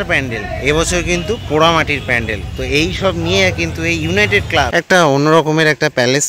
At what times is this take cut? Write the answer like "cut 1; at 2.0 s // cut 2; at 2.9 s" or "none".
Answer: cut 1; at 4.7 s